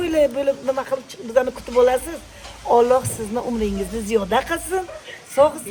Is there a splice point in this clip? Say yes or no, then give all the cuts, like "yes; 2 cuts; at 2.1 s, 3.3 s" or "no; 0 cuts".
no; 0 cuts